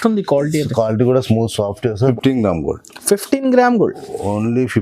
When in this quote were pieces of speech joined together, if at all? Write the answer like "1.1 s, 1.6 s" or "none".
2.1 s